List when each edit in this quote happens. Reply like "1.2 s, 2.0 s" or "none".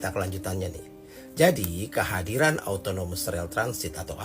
none